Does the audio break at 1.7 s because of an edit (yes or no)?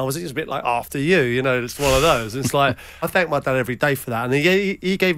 no